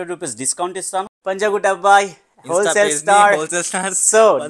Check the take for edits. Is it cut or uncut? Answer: cut